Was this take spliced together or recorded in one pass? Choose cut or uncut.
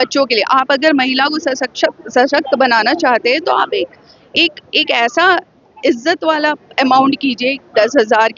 uncut